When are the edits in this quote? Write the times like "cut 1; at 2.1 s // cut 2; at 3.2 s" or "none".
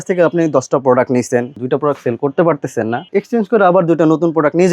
cut 1; at 1.6 s // cut 2; at 3.1 s